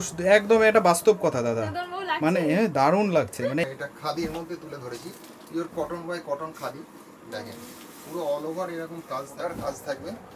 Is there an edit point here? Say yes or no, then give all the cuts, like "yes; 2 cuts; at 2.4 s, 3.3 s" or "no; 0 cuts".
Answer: yes; 2 cuts; at 3.6 s, 9.3 s